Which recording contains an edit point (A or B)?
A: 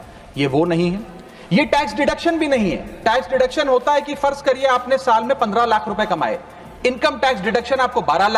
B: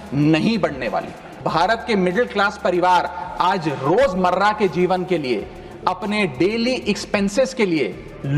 B